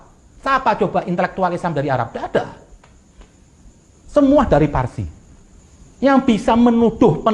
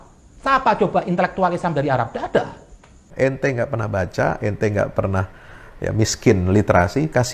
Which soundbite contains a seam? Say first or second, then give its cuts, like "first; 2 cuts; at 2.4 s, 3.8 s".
second; 1 cut; at 3.0 s